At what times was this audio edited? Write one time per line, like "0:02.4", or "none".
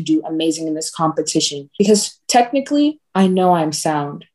0:01.6